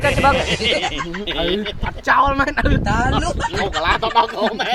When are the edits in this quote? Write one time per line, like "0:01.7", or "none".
none